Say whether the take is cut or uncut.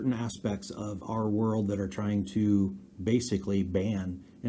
uncut